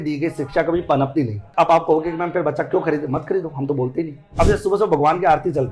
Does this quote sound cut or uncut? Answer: cut